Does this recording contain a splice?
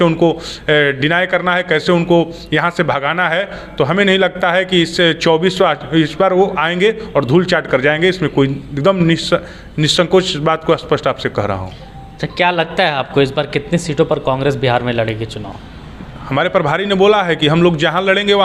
no; 0 cuts

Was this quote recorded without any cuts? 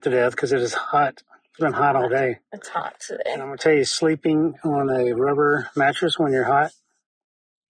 yes; 0 cuts

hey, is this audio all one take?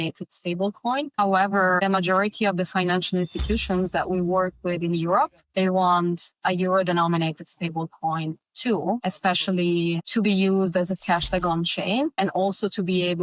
no; 2 cuts; at 1.1 s, 12.1 s

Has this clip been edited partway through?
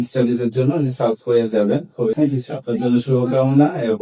no; 0 cuts

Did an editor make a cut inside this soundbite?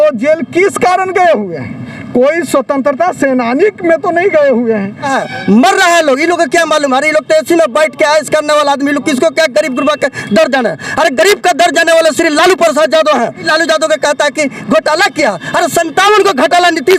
yes; 2 cuts; at 5.1 s, 13.5 s

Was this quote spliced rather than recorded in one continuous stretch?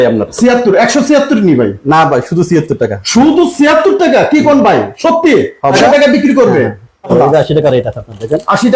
yes; 2 cuts; at 5.8 s, 7.1 s

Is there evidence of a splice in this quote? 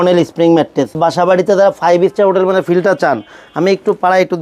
yes; 1 cut; at 1.0 s

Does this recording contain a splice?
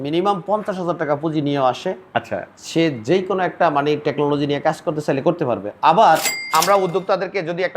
yes; 1 cut; at 6.4 s

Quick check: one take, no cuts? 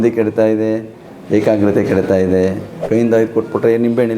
no; 1 cut; at 2.8 s

